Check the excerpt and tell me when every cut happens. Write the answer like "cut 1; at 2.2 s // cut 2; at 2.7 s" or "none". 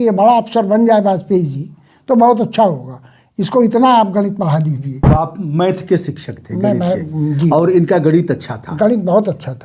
cut 1; at 5.1 s